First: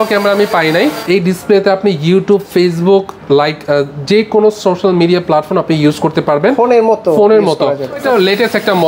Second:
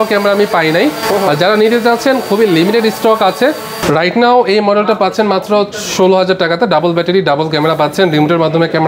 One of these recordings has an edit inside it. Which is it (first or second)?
first